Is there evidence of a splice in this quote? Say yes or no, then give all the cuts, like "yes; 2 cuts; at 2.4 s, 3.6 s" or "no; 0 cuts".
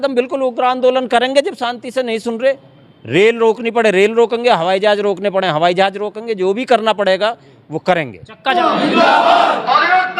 yes; 1 cut; at 8.5 s